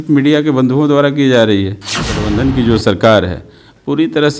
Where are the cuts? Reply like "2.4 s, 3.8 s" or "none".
2.2 s

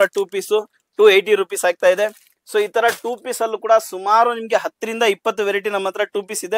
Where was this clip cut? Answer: none

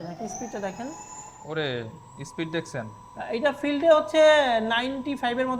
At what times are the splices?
none

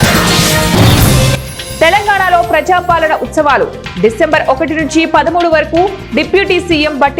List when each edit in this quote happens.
none

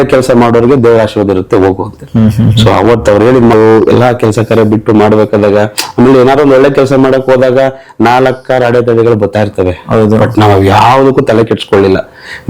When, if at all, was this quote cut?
3.5 s

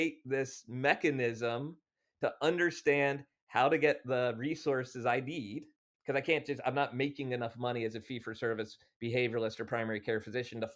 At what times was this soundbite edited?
5.9 s

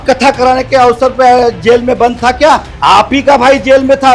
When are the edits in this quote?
none

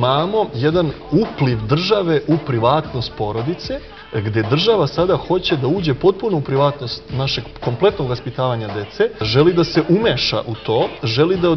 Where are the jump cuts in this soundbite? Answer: 4.0 s, 9.3 s

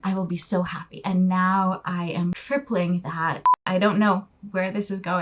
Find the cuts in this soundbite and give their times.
1.0 s, 2.3 s, 3.6 s

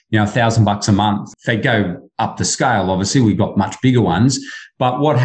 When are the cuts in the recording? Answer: 1.3 s

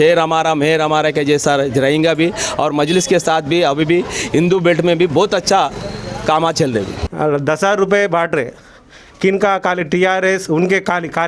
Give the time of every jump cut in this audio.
none

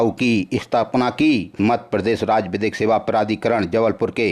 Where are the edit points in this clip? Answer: 1.5 s

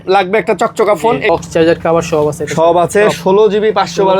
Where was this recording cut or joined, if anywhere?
1.3 s

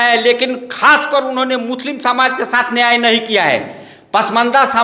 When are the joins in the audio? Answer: none

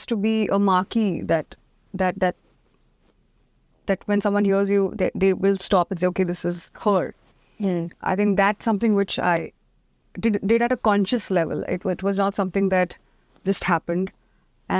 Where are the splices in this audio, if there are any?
none

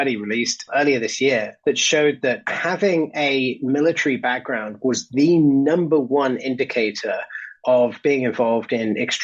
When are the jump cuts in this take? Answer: 1.5 s, 2.5 s

